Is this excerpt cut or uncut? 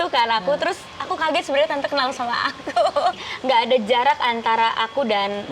cut